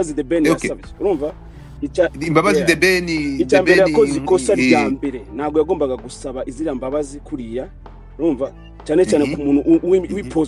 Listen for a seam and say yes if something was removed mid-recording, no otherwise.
no